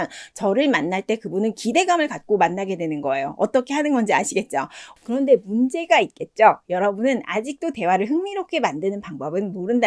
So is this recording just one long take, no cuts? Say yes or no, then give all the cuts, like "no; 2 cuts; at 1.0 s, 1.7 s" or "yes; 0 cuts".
yes; 0 cuts